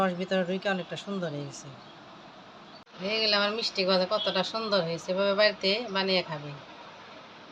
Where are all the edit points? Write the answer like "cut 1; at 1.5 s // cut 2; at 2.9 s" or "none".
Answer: cut 1; at 2.9 s